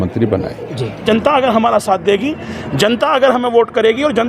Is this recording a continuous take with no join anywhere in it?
no; 1 cut; at 1.0 s

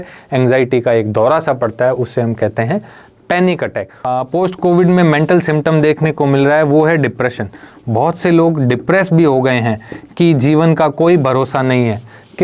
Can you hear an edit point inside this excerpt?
yes; 1 cut; at 4.0 s

